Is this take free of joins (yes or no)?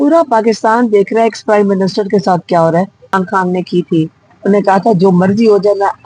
no